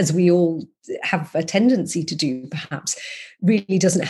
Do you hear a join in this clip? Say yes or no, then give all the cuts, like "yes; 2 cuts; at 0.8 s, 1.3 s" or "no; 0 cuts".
no; 0 cuts